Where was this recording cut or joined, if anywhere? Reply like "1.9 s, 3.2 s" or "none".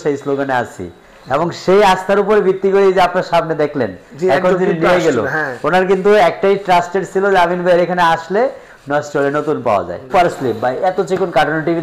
10.1 s